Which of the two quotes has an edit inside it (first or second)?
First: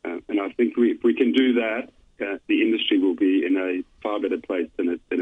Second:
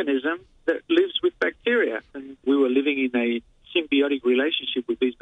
second